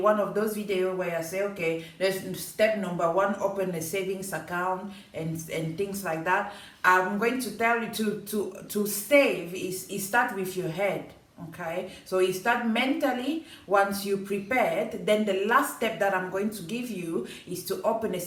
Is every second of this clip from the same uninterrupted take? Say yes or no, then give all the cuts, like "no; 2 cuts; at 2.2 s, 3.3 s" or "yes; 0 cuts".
yes; 0 cuts